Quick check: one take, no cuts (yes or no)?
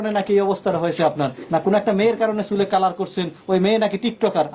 no